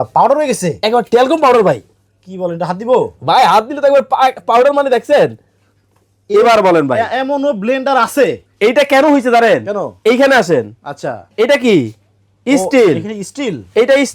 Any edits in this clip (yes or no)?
no